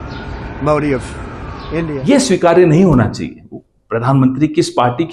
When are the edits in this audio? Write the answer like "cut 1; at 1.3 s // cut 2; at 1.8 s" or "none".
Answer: cut 1; at 1.9 s